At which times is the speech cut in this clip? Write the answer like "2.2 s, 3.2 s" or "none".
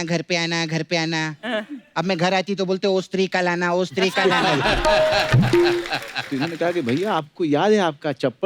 6.3 s